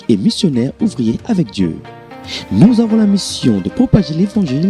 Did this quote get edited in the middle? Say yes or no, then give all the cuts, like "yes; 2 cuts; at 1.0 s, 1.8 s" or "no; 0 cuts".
no; 0 cuts